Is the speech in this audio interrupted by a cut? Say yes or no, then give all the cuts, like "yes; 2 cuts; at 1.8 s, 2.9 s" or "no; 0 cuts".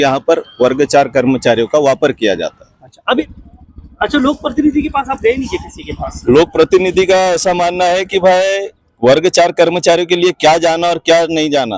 yes; 1 cut; at 3.2 s